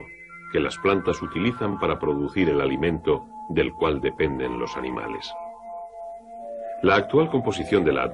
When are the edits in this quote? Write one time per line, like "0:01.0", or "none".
0:01.1